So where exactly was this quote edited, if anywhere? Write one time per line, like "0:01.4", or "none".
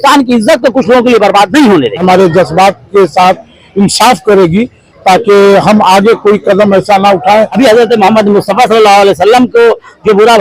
0:02.0
0:07.5